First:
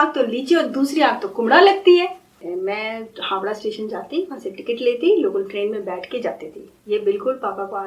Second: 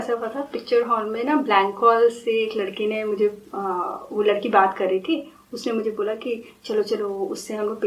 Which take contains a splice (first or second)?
first